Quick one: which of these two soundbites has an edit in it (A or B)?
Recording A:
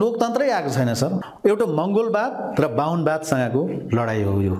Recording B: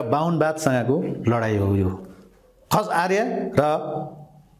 A